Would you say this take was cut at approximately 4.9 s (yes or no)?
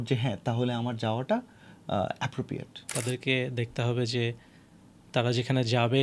no